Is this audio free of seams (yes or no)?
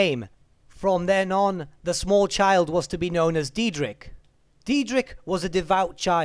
no